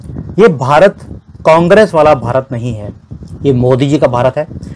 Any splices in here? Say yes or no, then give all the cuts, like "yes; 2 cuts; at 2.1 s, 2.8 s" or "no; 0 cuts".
no; 0 cuts